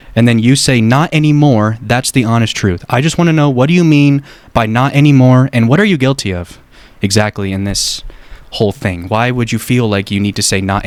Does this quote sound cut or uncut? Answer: uncut